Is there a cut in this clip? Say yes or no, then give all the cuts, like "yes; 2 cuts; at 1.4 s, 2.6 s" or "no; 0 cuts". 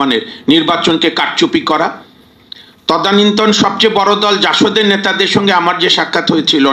no; 0 cuts